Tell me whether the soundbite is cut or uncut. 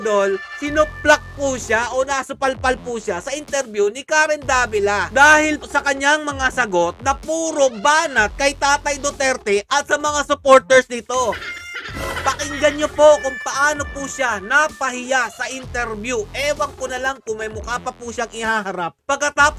uncut